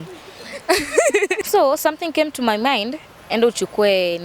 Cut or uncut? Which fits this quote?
cut